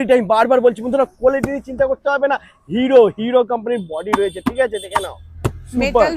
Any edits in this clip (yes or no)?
no